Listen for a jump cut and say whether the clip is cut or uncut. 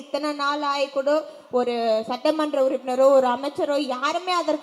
uncut